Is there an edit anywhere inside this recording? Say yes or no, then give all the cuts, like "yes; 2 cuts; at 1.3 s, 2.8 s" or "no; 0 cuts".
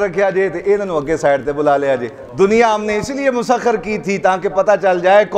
yes; 1 cut; at 2.2 s